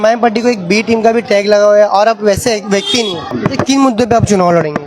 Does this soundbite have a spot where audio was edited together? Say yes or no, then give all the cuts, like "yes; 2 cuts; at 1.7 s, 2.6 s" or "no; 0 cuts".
yes; 1 cut; at 3.3 s